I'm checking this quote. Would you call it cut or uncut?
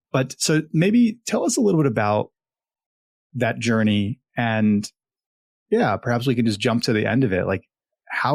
uncut